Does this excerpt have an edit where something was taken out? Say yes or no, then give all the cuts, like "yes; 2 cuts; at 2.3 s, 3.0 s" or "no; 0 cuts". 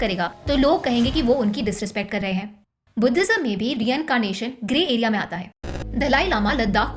yes; 1 cut; at 5.6 s